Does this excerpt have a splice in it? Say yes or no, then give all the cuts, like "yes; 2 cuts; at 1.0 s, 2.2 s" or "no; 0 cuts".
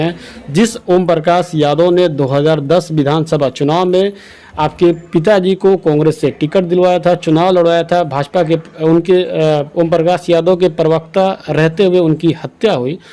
no; 0 cuts